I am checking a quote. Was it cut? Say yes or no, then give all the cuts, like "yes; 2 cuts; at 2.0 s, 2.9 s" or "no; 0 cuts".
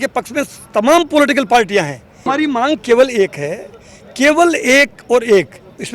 yes; 1 cut; at 2.3 s